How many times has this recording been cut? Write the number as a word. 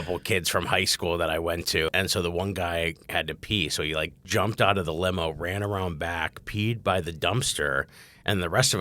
two